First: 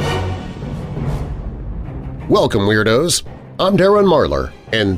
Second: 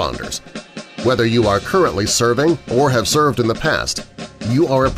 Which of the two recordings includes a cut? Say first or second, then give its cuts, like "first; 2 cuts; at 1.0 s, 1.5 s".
first; 1 cut; at 2.2 s